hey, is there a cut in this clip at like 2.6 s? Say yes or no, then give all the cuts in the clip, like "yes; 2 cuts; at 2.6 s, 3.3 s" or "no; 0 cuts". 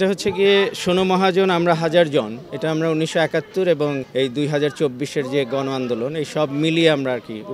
no; 1 cut; at 4.0 s